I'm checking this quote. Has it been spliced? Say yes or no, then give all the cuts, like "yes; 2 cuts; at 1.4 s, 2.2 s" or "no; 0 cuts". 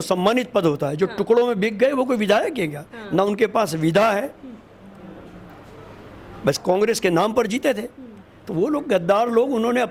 no; 0 cuts